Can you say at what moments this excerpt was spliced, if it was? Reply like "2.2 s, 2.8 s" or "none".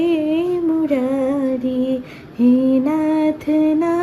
none